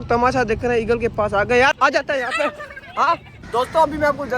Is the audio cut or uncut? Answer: cut